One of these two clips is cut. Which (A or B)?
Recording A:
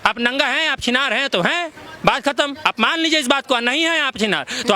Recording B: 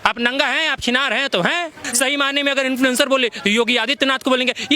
B